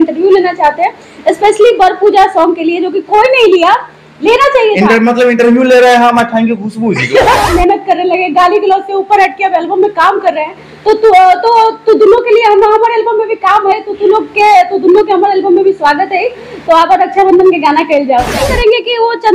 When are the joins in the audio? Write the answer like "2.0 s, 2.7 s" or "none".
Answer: 7.5 s, 18.4 s